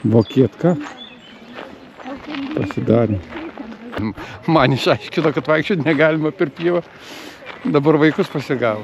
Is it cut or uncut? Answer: cut